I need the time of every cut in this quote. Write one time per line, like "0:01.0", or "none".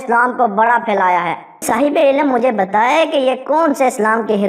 0:01.6